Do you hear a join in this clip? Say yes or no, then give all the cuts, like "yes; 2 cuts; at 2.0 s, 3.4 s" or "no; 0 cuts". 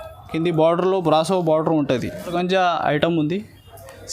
yes; 1 cut; at 2.3 s